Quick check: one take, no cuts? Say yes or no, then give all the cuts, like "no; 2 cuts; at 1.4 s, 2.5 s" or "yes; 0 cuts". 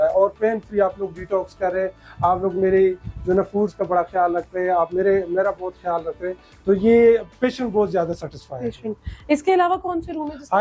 yes; 0 cuts